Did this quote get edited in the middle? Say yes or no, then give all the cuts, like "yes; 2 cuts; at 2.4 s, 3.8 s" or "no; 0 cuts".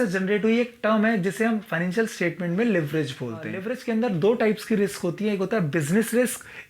yes; 1 cut; at 3.6 s